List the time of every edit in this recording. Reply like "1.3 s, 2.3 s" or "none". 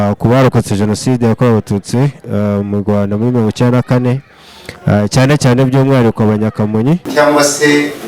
7.1 s